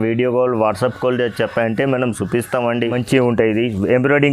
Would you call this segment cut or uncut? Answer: cut